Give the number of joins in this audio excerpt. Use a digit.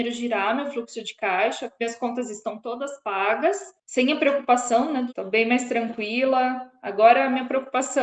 2